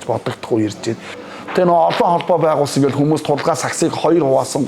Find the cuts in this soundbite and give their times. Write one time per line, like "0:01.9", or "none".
0:01.1